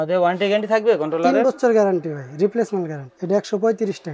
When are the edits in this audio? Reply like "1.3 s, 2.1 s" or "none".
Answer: 3.1 s